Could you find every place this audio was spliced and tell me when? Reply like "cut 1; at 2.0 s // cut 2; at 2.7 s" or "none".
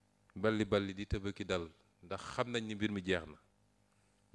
none